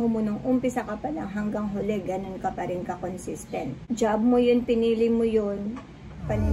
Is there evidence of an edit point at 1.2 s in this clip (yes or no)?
no